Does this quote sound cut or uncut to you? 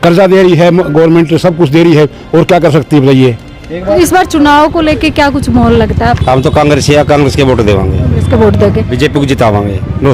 cut